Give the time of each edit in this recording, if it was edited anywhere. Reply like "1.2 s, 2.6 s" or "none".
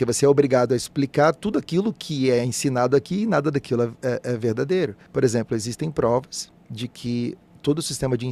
none